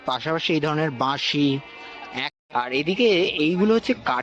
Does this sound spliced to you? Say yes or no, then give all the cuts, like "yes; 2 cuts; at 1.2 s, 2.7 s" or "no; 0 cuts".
yes; 1 cut; at 2.4 s